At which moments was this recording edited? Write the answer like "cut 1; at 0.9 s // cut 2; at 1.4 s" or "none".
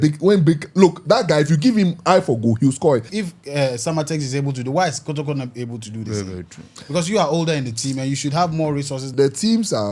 cut 1; at 3.1 s // cut 2; at 9.0 s